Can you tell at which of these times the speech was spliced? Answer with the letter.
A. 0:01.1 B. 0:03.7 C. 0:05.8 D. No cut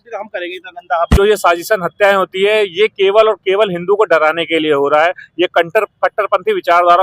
A